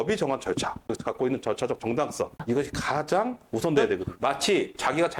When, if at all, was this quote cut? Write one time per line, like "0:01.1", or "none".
0:00.9
0:02.4
0:04.1

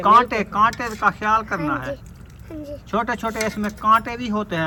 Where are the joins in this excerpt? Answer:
none

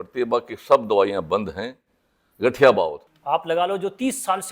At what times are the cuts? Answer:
0:03.1

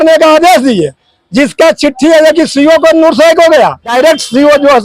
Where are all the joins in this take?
0:03.9

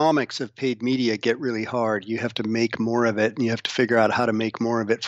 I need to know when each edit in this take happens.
none

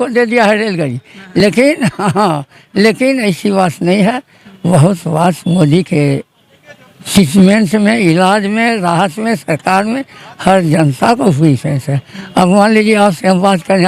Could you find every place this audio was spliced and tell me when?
none

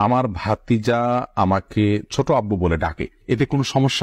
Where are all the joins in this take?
none

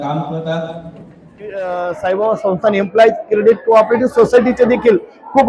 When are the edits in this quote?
0:01.6

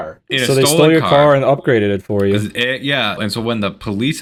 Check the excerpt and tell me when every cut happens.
none

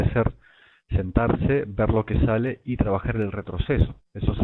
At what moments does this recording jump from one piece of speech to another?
0:02.5

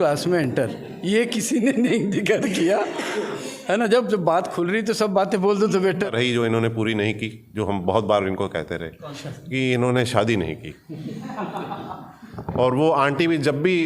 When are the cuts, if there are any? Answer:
0:06.1

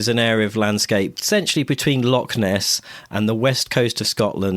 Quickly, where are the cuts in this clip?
0:01.2

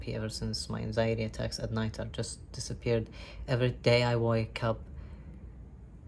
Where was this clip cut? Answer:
none

